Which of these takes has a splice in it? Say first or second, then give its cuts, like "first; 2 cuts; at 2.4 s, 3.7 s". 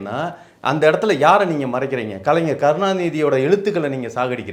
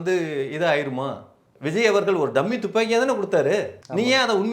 second; 1 cut; at 1.5 s